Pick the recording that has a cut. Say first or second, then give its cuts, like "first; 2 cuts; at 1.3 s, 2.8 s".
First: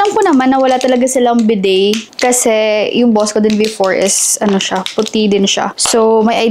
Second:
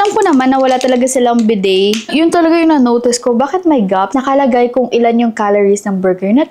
second; 2 cuts; at 2.1 s, 4.1 s